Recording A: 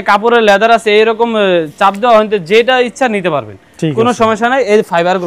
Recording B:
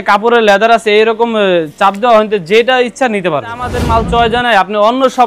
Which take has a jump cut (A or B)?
B